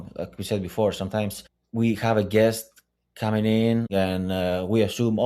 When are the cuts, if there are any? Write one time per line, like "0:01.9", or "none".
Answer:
0:03.9